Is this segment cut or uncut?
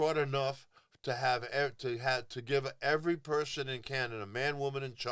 uncut